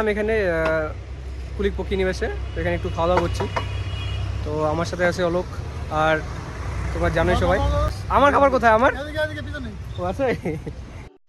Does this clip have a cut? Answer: no; 0 cuts

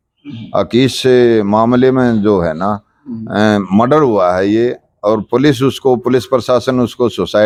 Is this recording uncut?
yes; 0 cuts

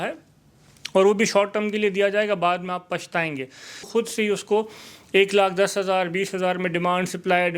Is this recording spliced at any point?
yes; 1 cut; at 3.9 s

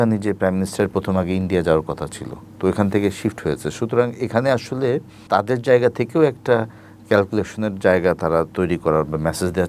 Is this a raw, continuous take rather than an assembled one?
no; 1 cut; at 5.1 s

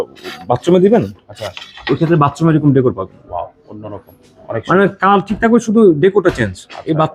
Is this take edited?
no; 0 cuts

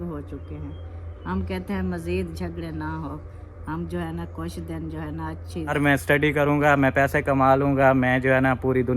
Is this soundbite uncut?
no; 1 cut; at 5.7 s

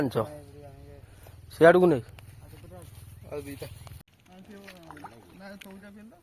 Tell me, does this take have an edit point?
yes; 1 cut; at 4.1 s

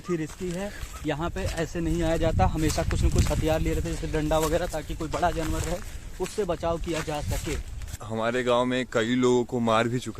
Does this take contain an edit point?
yes; 1 cut; at 8.0 s

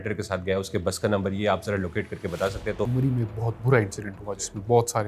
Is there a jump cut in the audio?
yes; 1 cut; at 2.9 s

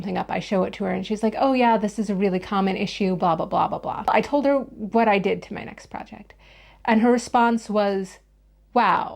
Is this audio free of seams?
no; 1 cut; at 4.1 s

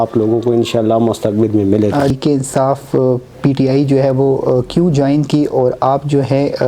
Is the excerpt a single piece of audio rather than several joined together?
no; 1 cut; at 2.1 s

